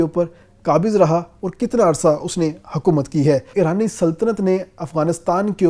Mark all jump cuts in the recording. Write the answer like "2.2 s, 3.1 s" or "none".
3.5 s